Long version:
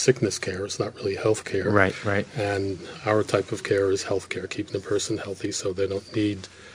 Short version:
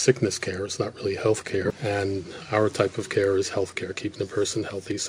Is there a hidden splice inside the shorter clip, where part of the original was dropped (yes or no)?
yes